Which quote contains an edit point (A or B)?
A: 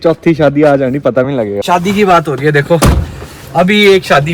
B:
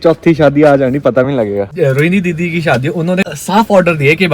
B